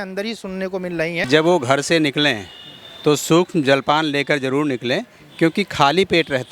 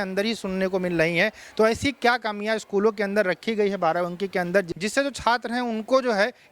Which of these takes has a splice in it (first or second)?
first